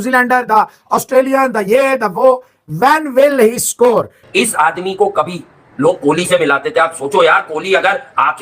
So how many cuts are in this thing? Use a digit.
1